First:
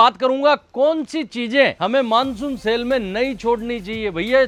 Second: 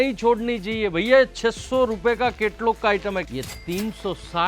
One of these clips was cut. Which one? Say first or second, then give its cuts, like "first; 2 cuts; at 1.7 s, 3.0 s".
second; 1 cut; at 3.3 s